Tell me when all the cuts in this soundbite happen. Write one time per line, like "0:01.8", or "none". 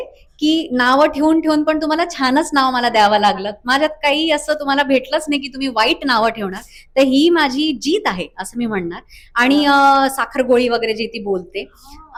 none